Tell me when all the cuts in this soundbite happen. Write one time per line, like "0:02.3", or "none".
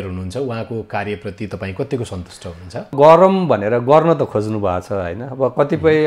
0:02.9